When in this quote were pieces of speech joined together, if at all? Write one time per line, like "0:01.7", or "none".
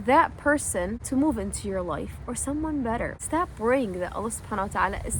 0:01.0
0:03.2